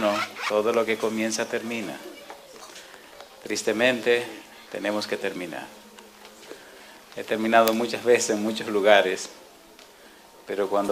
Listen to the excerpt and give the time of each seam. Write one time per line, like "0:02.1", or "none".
none